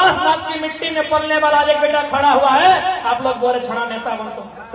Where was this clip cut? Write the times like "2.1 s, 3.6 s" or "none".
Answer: none